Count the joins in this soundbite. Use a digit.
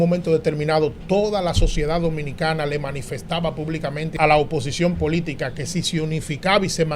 1